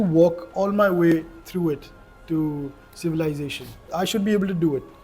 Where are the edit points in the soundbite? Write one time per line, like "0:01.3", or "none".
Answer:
0:03.9